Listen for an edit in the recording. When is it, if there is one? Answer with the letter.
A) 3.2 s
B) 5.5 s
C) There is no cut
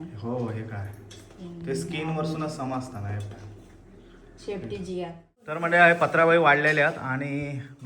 B